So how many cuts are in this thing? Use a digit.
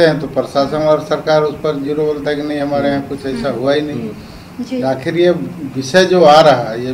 0